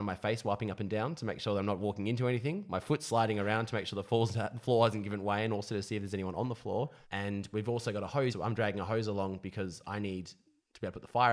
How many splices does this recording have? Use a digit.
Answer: 2